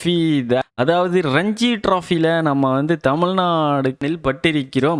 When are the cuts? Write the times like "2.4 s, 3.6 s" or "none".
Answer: 4.0 s